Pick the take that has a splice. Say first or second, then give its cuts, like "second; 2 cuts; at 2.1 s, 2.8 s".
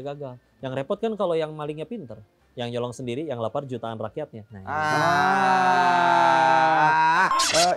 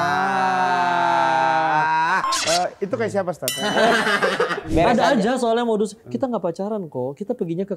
second; 1 cut; at 4.7 s